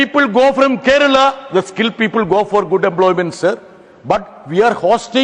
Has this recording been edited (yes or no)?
no